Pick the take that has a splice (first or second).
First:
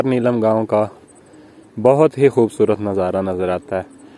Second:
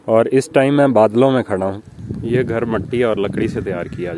second